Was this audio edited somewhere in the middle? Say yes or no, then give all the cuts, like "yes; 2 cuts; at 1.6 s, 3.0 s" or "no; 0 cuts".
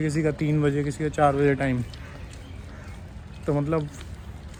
no; 0 cuts